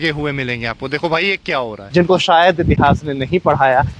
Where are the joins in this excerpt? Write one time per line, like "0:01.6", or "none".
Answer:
0:01.8